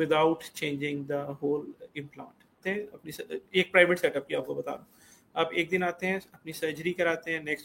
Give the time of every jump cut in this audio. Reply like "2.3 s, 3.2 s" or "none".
2.6 s